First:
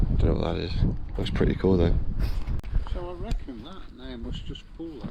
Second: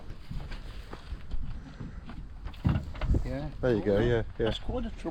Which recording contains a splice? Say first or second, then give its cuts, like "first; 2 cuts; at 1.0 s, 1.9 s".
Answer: first; 1 cut; at 2.5 s